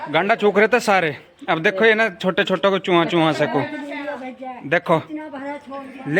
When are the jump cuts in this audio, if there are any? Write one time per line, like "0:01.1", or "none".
none